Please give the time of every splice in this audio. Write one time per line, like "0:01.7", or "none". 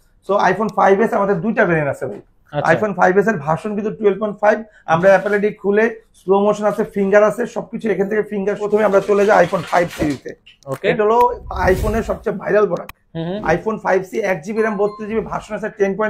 0:08.6